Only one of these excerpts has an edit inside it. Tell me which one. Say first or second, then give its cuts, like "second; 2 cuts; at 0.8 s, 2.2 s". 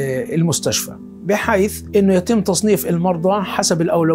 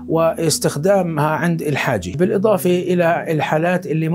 second; 1 cut; at 2.1 s